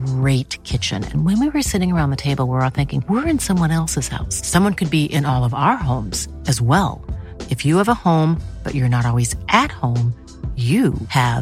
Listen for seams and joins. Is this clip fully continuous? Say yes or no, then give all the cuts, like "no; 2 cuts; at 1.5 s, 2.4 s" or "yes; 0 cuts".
yes; 0 cuts